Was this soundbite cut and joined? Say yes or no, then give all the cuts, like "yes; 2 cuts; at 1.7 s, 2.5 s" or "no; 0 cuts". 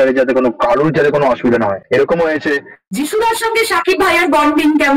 yes; 1 cut; at 2.8 s